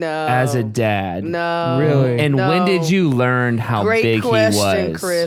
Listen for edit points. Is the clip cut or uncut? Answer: uncut